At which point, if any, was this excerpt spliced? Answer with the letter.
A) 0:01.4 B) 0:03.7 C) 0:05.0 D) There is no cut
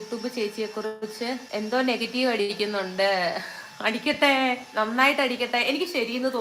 A